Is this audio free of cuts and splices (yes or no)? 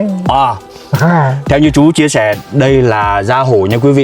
yes